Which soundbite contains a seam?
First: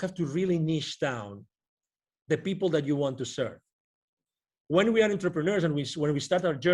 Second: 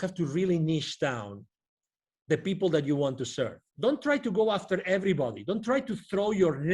second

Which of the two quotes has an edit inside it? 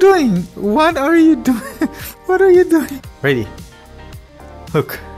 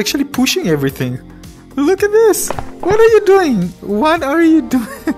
first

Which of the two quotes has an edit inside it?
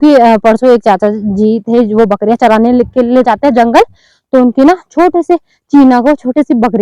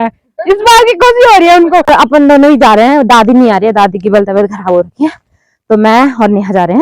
second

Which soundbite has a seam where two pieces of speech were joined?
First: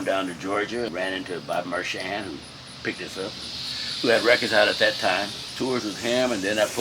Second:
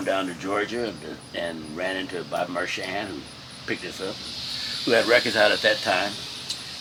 first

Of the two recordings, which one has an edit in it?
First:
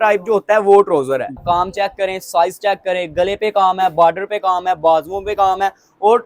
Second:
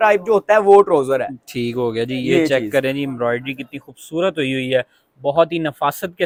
first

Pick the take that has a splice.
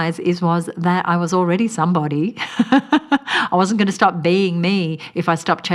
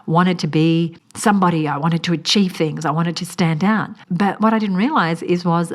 second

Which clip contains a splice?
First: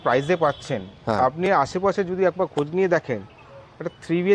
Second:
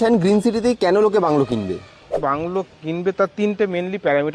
second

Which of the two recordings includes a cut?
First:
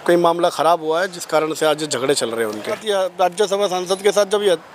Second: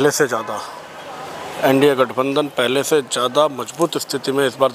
first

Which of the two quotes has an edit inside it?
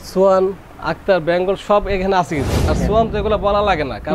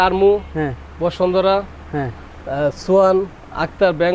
first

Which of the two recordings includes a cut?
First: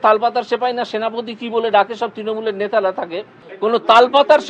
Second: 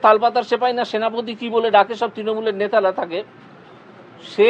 first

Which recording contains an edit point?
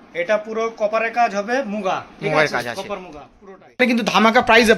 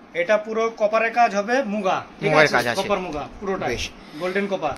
first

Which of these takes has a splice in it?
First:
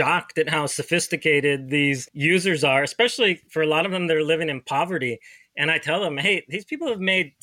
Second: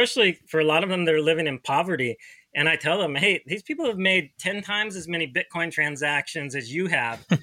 first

